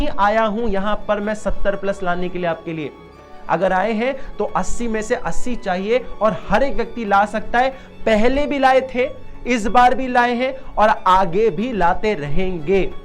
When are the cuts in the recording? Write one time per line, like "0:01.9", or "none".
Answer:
none